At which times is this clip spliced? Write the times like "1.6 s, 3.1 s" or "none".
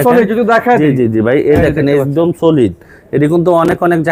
none